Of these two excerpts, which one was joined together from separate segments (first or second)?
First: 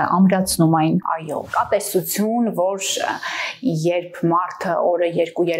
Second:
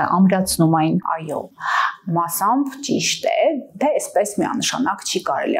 first